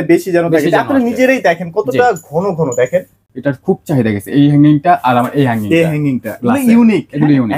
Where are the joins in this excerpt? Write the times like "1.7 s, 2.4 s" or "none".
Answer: 3.2 s